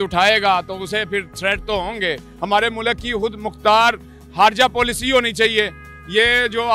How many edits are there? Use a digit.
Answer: 2